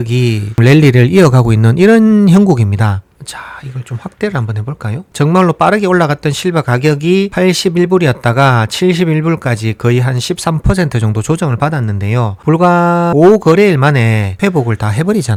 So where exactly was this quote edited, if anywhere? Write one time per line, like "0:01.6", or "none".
none